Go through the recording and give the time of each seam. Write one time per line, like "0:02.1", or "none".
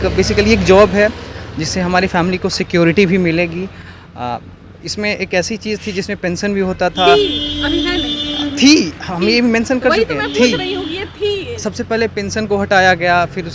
none